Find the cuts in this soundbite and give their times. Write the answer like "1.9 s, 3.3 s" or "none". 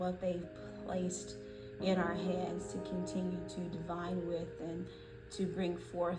none